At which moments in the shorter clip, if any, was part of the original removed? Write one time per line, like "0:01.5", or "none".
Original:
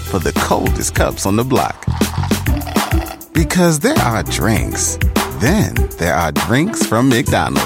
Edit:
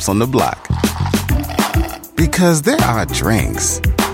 none